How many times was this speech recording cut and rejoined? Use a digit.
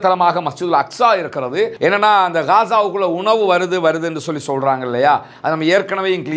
1